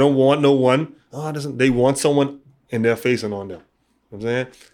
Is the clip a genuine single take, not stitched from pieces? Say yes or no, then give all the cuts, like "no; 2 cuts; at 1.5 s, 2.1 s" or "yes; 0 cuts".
yes; 0 cuts